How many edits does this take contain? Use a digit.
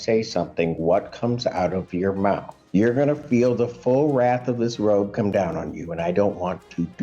1